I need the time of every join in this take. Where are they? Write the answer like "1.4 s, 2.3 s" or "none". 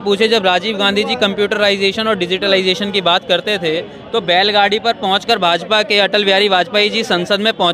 none